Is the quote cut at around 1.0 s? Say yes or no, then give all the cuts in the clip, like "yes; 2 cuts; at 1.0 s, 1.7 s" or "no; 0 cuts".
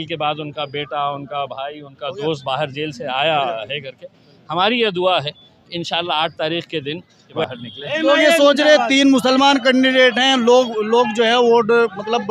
no; 1 cut; at 7.4 s